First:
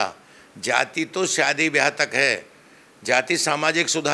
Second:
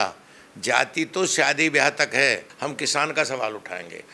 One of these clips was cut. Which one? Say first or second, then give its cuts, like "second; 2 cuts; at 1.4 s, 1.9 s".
second; 1 cut; at 2.5 s